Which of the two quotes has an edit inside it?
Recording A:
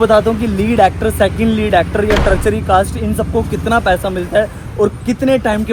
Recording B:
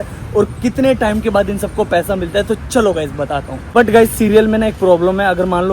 B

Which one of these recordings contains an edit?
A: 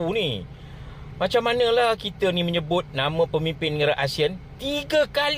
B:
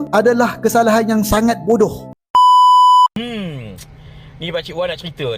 B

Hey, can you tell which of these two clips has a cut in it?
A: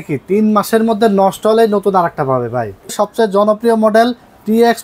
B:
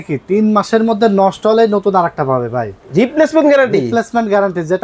A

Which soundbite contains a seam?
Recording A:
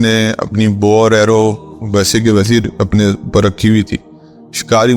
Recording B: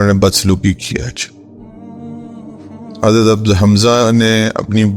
B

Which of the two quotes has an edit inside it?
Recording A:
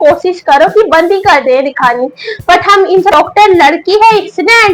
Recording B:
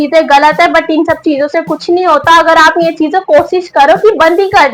A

